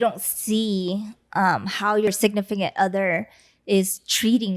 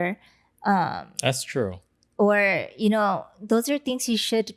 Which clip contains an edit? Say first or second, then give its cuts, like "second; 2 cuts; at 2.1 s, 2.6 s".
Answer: first; 1 cut; at 2.1 s